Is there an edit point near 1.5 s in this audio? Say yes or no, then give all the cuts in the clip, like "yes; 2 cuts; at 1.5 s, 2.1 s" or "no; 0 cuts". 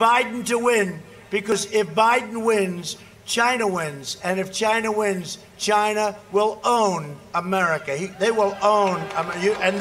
yes; 1 cut; at 1.5 s